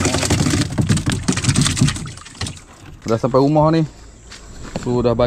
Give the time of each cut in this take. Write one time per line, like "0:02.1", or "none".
0:02.9

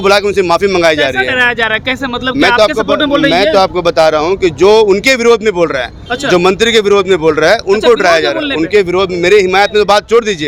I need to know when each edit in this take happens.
none

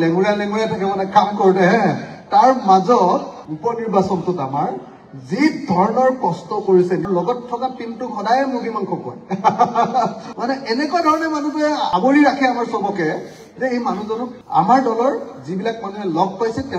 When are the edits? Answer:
0:03.4
0:07.0
0:10.2

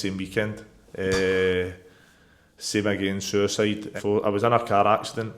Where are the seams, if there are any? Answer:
0:03.9

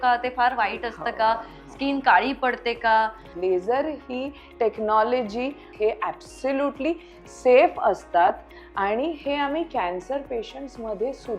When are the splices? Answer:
0:03.3
0:05.7

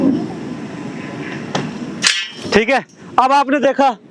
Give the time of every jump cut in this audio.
none

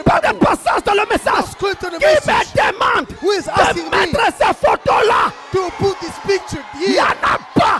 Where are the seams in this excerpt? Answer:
none

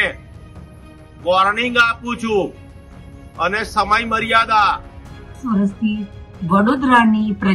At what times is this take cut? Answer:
0:05.4

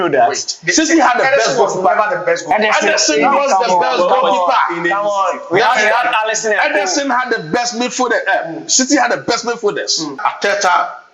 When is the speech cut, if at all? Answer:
0:10.1

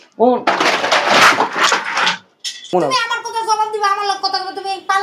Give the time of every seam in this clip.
0:02.7

